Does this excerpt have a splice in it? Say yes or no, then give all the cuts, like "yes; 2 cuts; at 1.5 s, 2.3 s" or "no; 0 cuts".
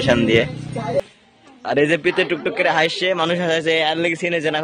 yes; 1 cut; at 1.0 s